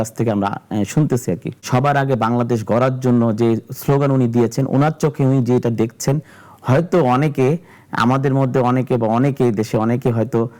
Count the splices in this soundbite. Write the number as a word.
one